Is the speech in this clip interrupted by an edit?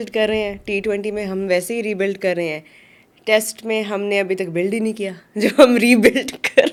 no; 0 cuts

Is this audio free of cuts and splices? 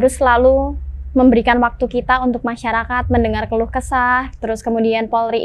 yes; 0 cuts

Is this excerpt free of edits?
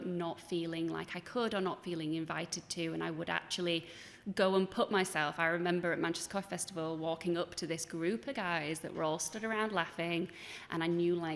yes; 0 cuts

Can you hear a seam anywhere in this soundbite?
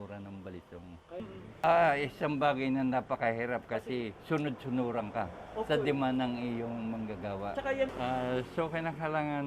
yes; 2 cuts; at 1.2 s, 7.9 s

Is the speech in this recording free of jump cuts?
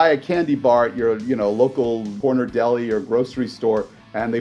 no; 1 cut; at 2.1 s

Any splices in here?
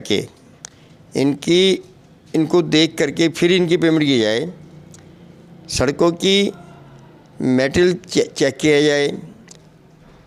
no; 0 cuts

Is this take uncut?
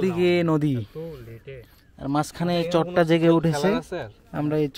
yes; 0 cuts

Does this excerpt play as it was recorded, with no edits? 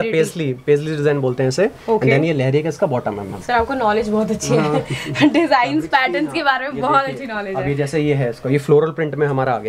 yes; 0 cuts

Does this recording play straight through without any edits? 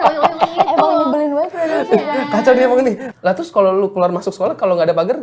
no; 1 cut; at 3.1 s

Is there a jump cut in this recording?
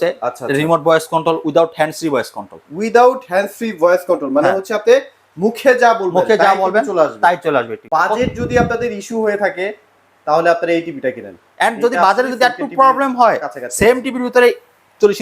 yes; 1 cut; at 7.8 s

